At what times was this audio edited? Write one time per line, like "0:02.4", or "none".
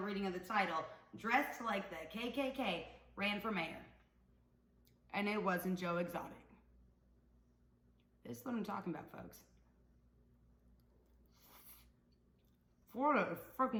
none